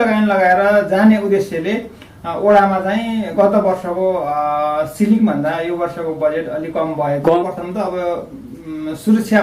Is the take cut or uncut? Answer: cut